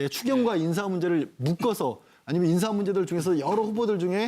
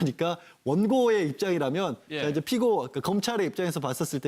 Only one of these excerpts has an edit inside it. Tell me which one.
first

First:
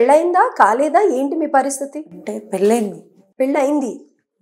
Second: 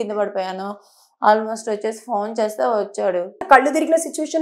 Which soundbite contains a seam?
second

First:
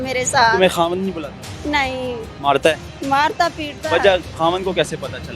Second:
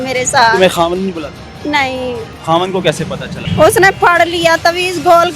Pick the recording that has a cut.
second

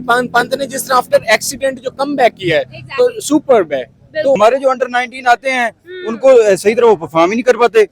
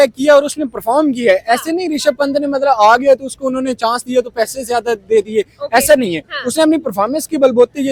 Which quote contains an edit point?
first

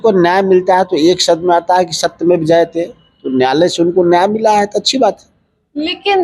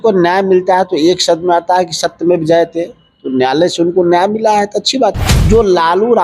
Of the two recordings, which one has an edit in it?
second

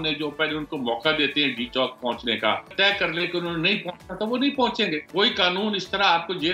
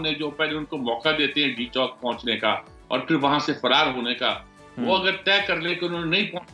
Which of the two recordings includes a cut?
first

